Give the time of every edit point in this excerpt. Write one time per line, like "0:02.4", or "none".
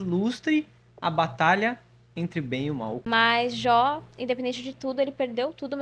0:03.0